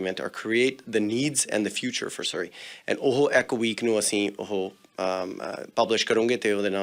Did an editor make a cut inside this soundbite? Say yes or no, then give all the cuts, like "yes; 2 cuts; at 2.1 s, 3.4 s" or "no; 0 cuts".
no; 0 cuts